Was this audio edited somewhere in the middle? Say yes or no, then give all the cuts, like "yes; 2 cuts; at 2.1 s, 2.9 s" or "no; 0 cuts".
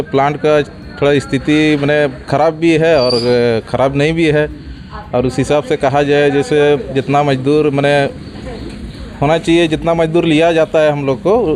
no; 0 cuts